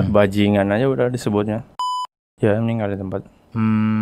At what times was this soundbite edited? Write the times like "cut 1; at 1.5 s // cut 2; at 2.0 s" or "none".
cut 1; at 2.2 s